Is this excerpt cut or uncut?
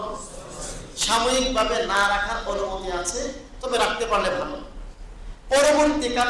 uncut